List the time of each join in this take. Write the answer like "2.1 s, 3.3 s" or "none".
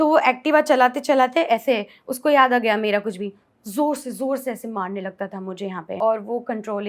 6.0 s